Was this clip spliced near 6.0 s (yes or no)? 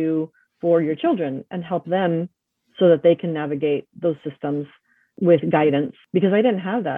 yes